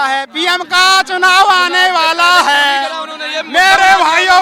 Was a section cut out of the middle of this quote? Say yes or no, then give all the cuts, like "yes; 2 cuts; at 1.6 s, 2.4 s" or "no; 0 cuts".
no; 0 cuts